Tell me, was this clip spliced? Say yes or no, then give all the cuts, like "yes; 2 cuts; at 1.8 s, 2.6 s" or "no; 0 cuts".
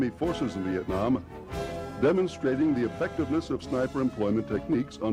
no; 0 cuts